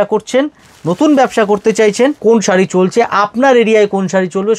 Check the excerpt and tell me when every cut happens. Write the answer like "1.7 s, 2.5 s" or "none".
2.2 s